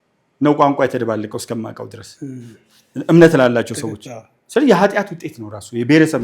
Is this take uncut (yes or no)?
yes